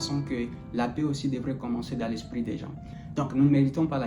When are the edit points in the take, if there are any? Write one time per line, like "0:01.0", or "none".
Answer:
0:02.7